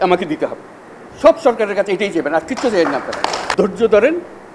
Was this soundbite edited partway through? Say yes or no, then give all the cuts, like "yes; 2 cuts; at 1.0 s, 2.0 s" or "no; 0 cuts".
yes; 1 cut; at 3.4 s